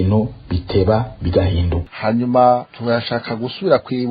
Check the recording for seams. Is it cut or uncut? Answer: cut